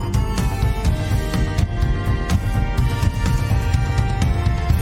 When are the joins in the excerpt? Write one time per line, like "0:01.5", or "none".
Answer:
none